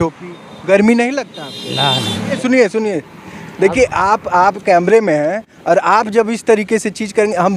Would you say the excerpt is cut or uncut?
uncut